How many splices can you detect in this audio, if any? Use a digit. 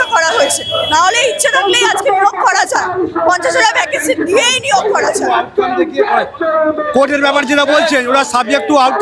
0